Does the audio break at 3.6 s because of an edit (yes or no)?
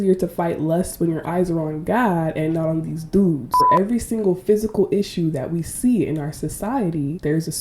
yes